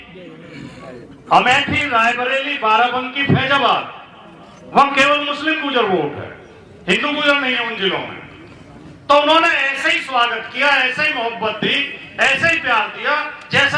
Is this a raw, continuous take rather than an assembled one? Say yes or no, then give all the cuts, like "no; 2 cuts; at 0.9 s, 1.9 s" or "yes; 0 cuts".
yes; 0 cuts